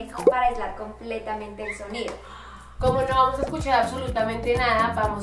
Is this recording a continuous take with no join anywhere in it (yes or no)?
yes